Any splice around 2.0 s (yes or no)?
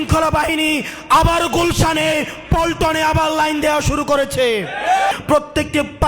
no